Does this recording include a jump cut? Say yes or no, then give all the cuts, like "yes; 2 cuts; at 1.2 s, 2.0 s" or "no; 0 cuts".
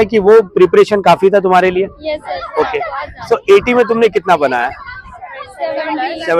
no; 0 cuts